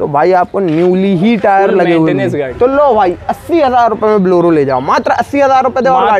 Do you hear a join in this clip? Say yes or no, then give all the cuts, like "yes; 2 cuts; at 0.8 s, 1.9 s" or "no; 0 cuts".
yes; 1 cut; at 2.5 s